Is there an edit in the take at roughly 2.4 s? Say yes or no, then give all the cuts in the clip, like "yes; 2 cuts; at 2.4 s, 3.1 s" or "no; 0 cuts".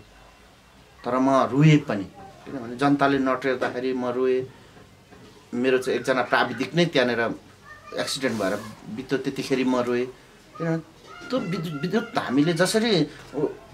no; 0 cuts